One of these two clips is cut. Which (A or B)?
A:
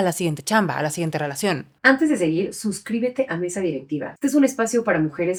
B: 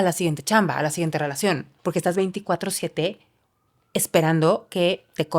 B